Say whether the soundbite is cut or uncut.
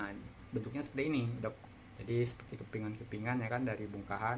uncut